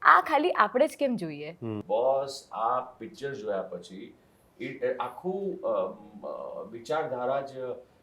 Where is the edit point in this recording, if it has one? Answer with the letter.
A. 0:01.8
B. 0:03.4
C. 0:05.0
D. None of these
A